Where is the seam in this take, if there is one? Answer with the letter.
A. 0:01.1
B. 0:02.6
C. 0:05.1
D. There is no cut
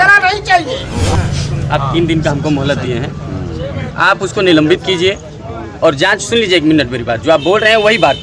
A